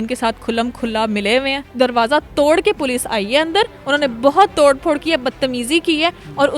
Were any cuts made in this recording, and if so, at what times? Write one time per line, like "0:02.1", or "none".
0:01.7